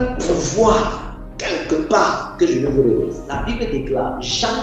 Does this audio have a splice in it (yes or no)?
yes